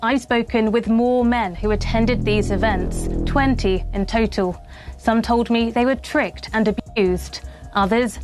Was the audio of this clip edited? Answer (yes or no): no